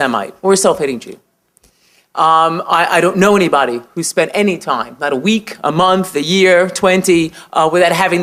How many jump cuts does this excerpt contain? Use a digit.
0